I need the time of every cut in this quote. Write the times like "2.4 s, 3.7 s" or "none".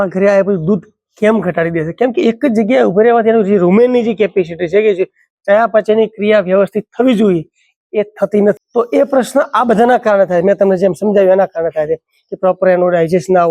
8.6 s